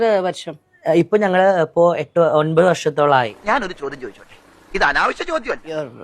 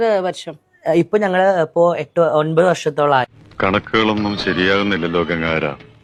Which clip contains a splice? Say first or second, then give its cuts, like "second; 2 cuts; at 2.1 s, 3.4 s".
first; 1 cut; at 1.1 s